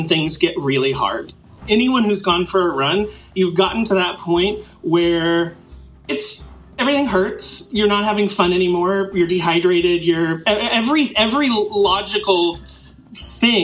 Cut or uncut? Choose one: cut